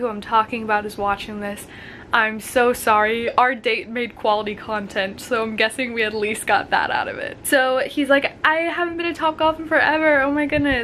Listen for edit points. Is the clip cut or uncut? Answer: uncut